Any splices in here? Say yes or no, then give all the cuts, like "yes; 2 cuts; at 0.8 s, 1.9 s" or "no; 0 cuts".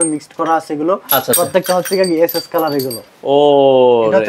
yes; 1 cut; at 3.0 s